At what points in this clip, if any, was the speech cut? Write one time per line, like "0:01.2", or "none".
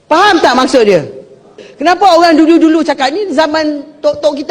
0:01.7